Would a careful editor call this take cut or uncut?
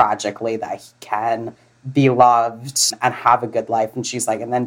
cut